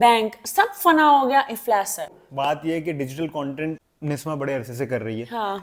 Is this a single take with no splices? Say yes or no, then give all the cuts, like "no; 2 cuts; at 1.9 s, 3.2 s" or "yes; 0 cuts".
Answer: yes; 0 cuts